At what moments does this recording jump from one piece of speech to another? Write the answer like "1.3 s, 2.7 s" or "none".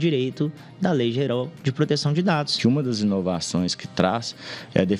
2.5 s

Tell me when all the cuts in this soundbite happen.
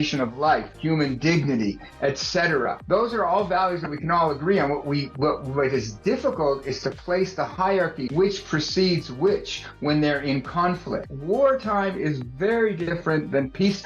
11.1 s, 12.9 s

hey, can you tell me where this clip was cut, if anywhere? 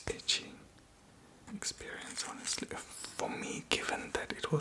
1.5 s

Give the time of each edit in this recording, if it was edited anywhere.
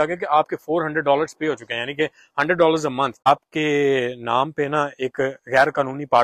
3.3 s

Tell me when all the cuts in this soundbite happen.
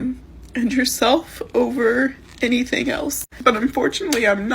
3.2 s

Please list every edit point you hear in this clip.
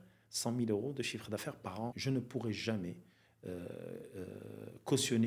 2.0 s

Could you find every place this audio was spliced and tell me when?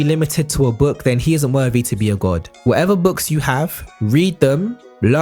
2.5 s

